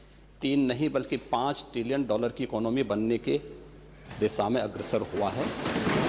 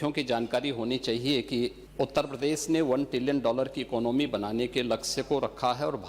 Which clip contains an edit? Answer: second; 1 cut; at 1.8 s

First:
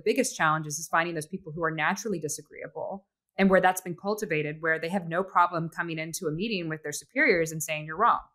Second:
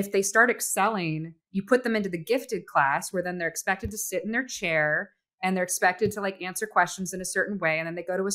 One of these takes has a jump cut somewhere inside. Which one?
second; 1 cut; at 1.4 s

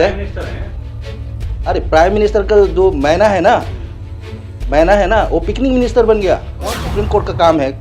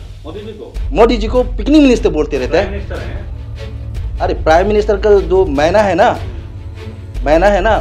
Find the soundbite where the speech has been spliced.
first; 1 cut; at 6.8 s

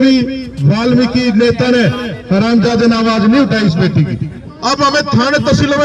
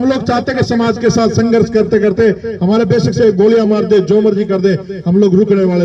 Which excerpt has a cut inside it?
first; 1 cut; at 4.5 s

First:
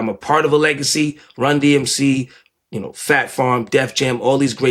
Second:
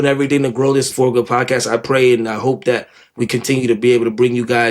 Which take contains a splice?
second; 1 cut; at 0.9 s

